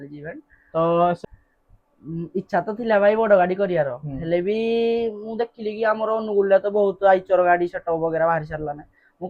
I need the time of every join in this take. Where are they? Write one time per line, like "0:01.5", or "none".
0:01.2